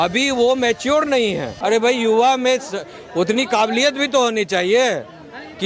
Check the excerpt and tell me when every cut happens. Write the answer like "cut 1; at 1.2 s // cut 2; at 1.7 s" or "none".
cut 1; at 1.5 s